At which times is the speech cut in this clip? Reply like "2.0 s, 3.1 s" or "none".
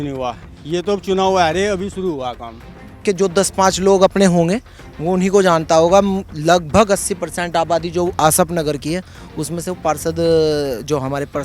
3.0 s